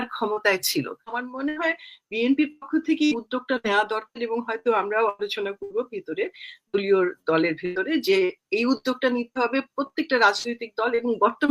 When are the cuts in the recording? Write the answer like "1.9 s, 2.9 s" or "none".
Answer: 1.2 s